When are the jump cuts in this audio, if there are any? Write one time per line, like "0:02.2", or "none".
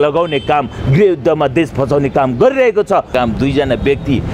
0:03.1